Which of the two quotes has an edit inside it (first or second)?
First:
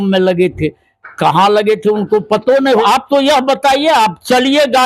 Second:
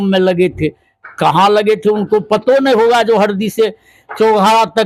first